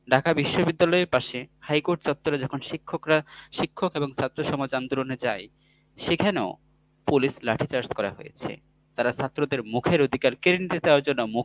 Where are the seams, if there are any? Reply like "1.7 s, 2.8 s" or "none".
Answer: none

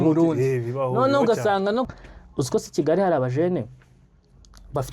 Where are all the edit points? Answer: 1.9 s

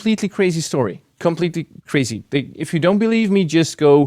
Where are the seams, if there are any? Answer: 1.1 s

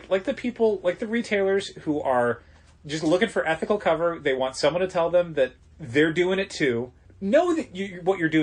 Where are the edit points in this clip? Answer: 5.6 s, 7.0 s

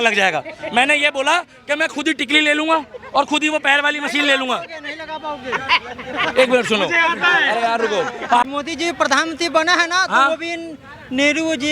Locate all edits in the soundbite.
8.4 s

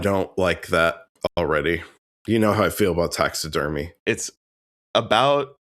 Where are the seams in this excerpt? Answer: 3.9 s

